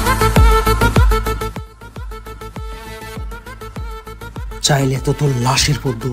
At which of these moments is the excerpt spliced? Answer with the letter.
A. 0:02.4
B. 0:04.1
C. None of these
C